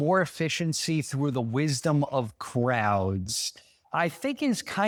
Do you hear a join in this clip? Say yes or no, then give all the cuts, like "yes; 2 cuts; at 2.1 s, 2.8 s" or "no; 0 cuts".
no; 0 cuts